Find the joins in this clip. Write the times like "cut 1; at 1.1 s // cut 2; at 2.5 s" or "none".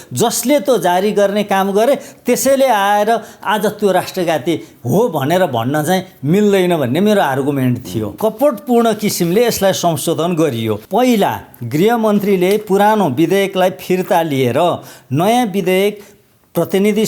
cut 1; at 8.0 s // cut 2; at 10.8 s